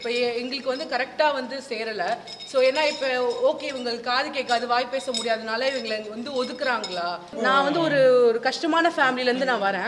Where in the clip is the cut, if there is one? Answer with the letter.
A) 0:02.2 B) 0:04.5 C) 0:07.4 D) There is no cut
C